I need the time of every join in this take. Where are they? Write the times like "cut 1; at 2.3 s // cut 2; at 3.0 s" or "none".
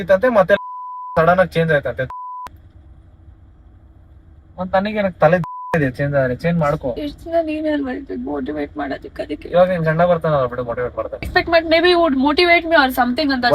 cut 1; at 7.0 s // cut 2; at 11.3 s